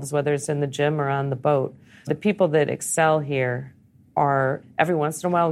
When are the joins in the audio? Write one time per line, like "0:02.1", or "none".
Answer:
0:02.1
0:04.6